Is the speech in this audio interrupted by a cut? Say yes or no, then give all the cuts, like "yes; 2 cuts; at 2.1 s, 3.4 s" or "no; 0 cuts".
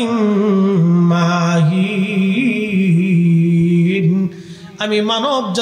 no; 0 cuts